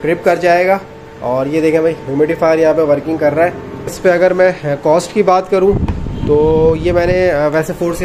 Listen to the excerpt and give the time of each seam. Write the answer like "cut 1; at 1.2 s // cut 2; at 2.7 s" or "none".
cut 1; at 3.9 s